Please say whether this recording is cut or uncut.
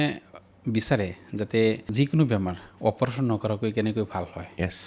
cut